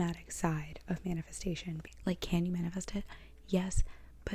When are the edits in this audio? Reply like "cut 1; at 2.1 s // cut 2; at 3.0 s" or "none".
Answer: cut 1; at 1.9 s